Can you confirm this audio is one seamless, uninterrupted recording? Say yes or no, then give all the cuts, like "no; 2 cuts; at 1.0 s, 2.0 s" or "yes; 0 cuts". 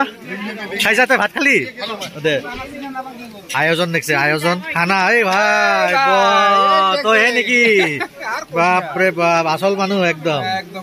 yes; 0 cuts